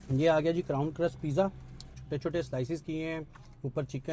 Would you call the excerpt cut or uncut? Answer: uncut